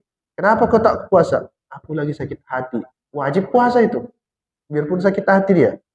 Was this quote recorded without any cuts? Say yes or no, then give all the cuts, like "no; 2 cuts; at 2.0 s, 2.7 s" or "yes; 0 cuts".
yes; 0 cuts